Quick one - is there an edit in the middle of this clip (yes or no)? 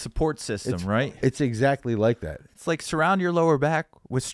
yes